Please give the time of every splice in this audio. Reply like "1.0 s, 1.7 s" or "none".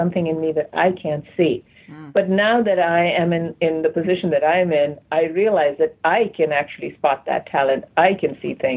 none